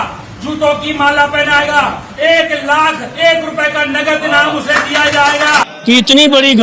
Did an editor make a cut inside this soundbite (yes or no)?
yes